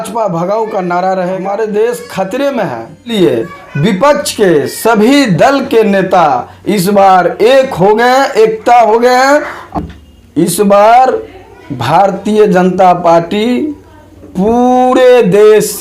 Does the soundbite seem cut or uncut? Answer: cut